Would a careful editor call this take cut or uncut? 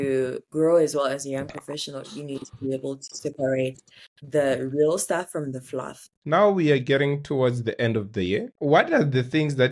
cut